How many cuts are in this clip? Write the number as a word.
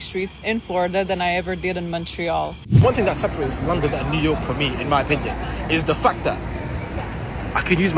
one